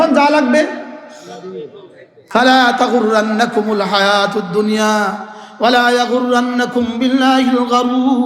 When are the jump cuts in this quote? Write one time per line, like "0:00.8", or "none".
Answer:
0:02.1